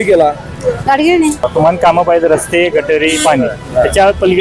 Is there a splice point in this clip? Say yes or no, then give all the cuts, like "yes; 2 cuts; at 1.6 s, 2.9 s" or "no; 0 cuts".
yes; 1 cut; at 1.4 s